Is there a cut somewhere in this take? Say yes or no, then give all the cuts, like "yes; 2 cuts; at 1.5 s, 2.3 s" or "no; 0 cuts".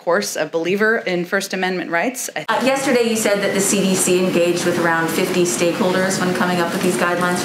yes; 1 cut; at 2.3 s